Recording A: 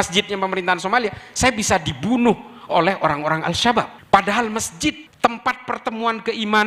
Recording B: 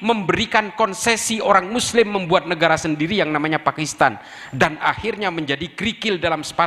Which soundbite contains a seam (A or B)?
A